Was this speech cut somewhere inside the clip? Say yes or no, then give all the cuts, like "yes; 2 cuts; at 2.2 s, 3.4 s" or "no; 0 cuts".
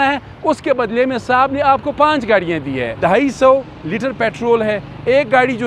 yes; 1 cut; at 2.9 s